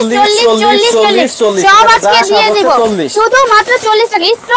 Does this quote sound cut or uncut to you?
uncut